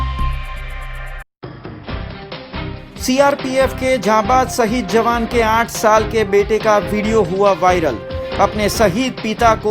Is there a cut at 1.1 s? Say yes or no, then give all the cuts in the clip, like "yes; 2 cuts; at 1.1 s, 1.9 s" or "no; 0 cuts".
yes; 1 cut; at 1.1 s